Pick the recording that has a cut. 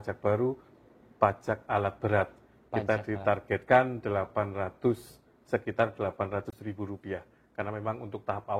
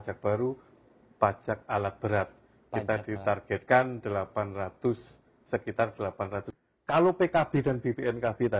second; 1 cut; at 6.6 s

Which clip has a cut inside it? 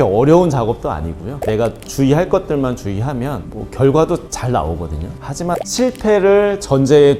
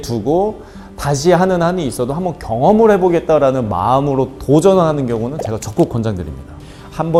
first; 1 cut; at 5.6 s

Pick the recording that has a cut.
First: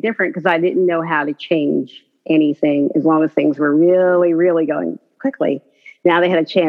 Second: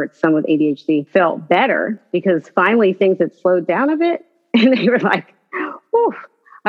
second; 2 cuts; at 1.1 s, 2.0 s

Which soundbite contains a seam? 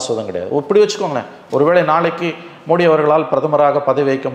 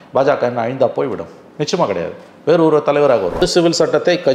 second; 1 cut; at 3.4 s

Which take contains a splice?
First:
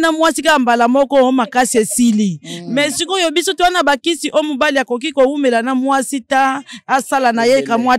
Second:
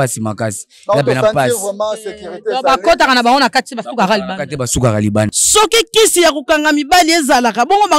second; 1 cut; at 5.3 s

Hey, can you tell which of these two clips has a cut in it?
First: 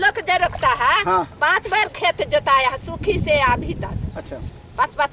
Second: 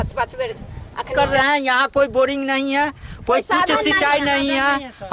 second; 1 cut; at 1.1 s

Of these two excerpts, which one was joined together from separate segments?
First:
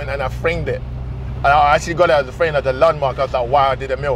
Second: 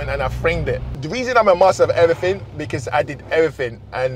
second; 1 cut; at 0.9 s

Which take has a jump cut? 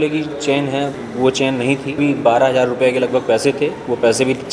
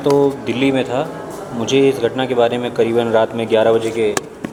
first; 2 cuts; at 0.9 s, 1.9 s

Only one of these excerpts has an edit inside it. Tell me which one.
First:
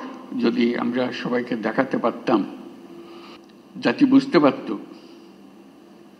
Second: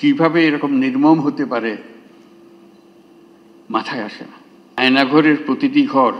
second; 1 cut; at 4.8 s

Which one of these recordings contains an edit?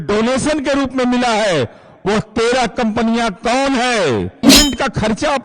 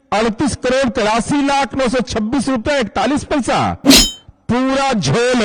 first; 1 cut; at 4.4 s

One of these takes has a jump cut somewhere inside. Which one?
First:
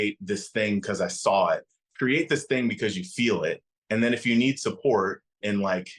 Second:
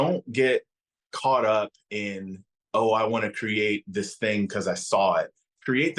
first; 1 cut; at 3.7 s

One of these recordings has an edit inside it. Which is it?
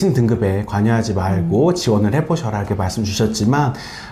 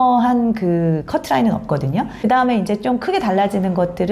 second; 1 cut; at 2.1 s

